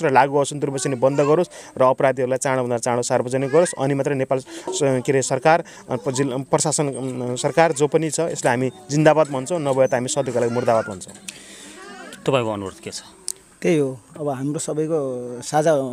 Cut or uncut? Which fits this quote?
uncut